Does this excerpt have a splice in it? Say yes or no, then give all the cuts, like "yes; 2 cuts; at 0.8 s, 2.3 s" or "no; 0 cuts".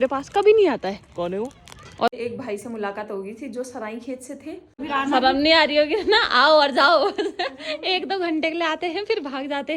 yes; 2 cuts; at 2.1 s, 4.8 s